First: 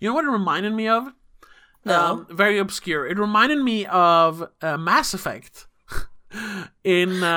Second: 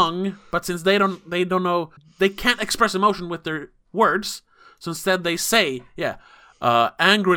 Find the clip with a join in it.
second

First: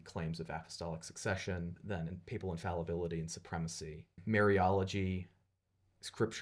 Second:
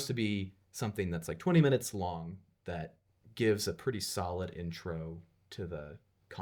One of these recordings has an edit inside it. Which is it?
first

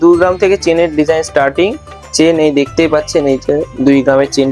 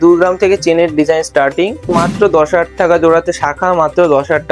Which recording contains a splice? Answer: second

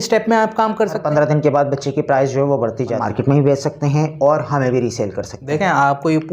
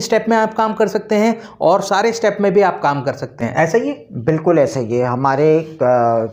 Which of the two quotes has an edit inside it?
first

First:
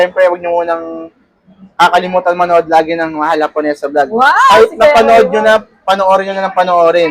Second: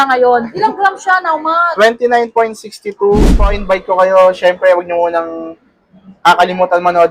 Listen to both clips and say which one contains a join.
second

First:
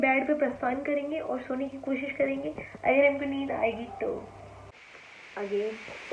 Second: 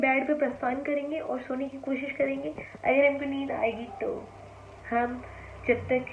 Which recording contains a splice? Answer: first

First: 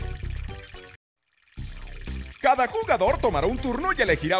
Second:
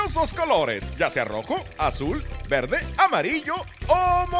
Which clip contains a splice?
first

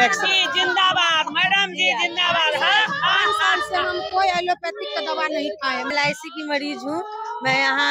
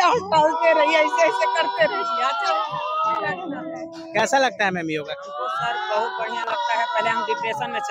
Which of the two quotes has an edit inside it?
first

